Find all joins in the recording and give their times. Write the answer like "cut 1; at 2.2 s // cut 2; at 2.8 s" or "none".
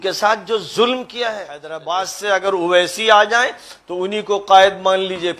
cut 1; at 1.7 s